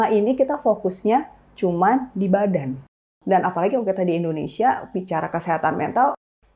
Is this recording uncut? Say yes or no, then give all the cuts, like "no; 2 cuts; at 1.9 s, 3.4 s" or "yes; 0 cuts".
no; 1 cut; at 3.1 s